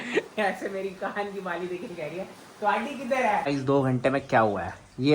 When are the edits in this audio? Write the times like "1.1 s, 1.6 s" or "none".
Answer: 3.5 s